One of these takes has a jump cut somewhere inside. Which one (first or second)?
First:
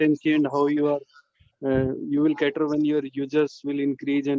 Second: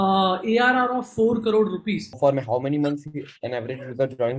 second